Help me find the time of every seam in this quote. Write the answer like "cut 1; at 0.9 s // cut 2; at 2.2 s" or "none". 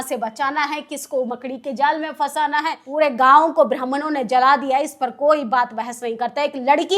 cut 1; at 2.8 s